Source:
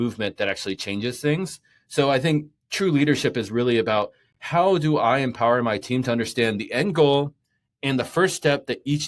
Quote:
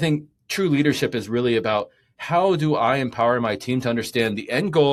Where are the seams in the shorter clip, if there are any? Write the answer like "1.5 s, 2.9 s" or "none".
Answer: none